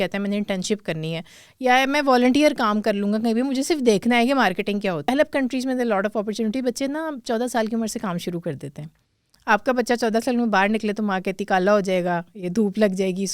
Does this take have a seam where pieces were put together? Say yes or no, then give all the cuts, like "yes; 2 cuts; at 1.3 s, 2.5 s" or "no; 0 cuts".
yes; 1 cut; at 5.1 s